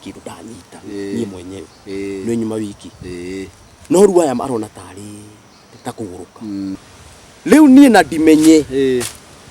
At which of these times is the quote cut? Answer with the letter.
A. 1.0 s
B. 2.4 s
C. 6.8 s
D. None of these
C